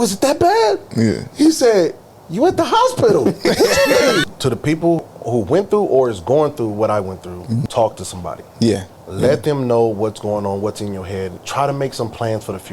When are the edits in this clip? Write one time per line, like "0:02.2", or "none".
0:04.2
0:05.0
0:07.6
0:11.4